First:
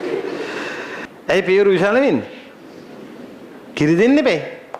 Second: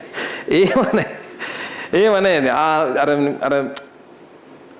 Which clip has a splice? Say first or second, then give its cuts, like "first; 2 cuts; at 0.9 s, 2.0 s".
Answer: first; 1 cut; at 1.1 s